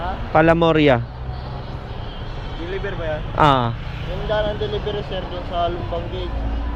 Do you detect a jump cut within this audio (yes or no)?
no